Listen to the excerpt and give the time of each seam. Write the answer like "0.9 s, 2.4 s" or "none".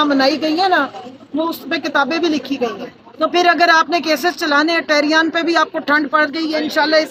none